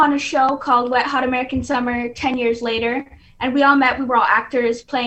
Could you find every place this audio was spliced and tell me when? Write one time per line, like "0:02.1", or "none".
none